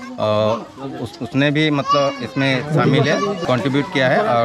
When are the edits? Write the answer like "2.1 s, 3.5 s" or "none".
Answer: 3.4 s